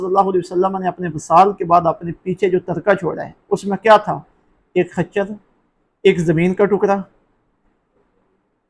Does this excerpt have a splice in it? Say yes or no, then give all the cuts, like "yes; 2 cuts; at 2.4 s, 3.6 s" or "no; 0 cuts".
no; 0 cuts